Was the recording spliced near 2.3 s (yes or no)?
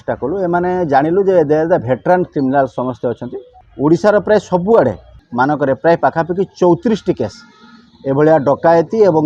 no